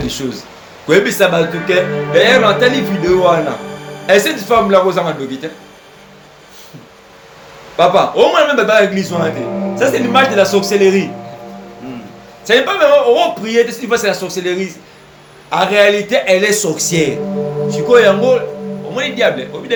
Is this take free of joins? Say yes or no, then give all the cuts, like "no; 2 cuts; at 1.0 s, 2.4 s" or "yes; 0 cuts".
yes; 0 cuts